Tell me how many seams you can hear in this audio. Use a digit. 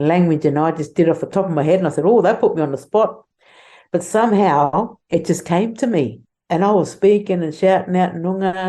1